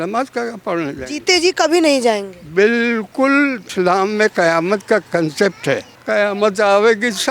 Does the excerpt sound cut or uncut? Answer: cut